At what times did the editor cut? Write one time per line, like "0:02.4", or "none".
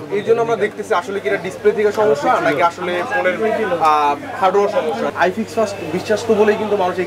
0:05.1